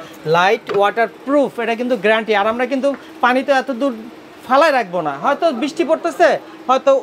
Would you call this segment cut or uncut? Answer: uncut